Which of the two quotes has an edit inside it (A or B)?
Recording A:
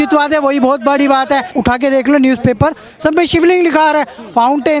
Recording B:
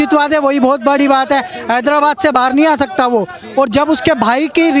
A